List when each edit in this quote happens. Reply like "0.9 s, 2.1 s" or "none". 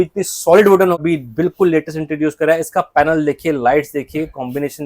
1.0 s